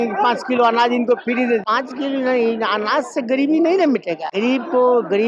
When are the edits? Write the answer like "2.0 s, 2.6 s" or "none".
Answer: 1.7 s, 4.3 s